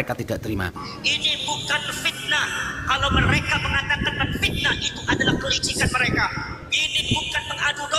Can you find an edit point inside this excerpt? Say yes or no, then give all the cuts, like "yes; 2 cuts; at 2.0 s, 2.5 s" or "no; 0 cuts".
yes; 1 cut; at 0.9 s